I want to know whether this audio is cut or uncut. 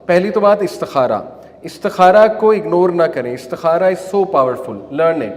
uncut